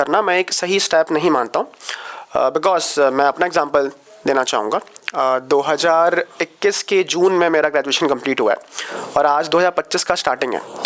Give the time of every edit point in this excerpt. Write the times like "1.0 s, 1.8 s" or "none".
none